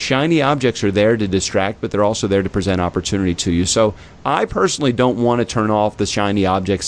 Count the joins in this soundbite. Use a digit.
0